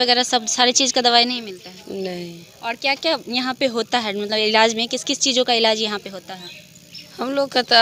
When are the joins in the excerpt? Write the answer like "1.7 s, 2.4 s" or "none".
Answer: none